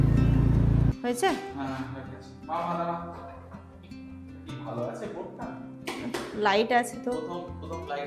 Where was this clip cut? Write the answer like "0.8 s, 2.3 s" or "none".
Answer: 0.9 s